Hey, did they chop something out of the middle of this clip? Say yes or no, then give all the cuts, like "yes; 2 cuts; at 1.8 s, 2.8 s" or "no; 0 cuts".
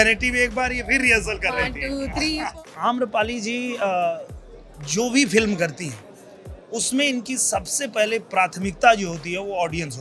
yes; 1 cut; at 2.6 s